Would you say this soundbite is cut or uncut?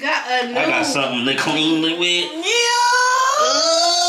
uncut